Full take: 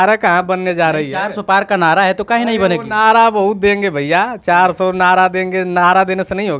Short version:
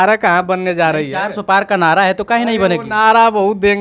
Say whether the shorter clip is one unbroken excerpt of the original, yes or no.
yes